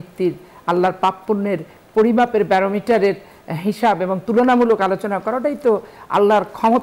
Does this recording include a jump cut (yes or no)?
no